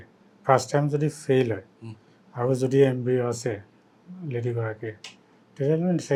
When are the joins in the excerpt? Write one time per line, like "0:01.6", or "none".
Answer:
none